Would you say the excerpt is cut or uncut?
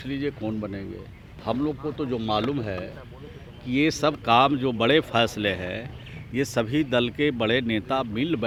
uncut